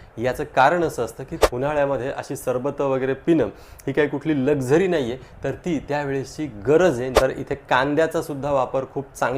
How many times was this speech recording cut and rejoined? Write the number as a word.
two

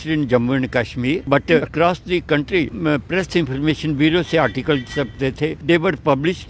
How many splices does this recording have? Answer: three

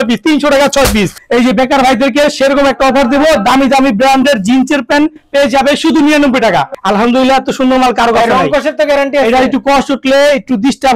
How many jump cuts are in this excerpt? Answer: two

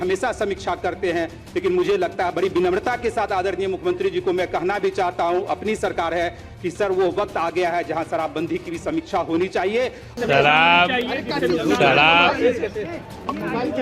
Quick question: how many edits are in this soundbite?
one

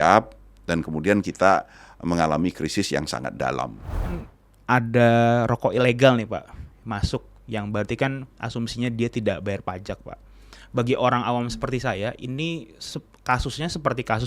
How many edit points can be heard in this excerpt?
one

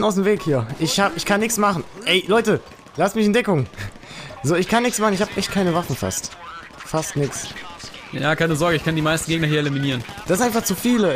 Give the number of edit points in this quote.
one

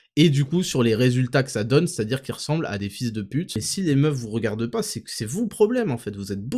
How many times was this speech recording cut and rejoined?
one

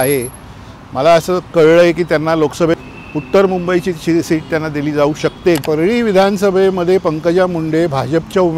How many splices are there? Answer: two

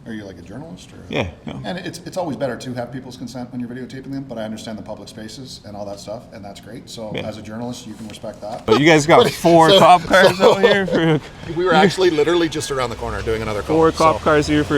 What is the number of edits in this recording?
two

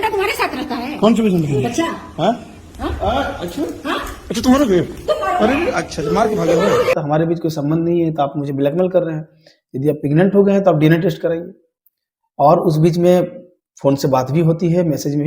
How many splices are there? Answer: one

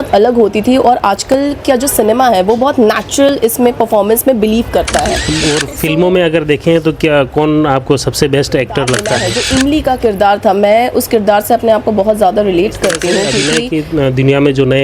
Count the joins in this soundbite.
three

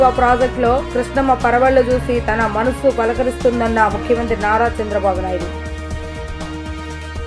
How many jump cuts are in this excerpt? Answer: zero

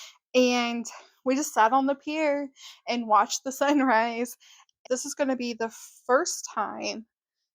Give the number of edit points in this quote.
one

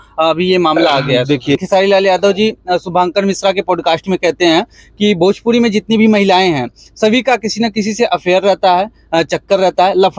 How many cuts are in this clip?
one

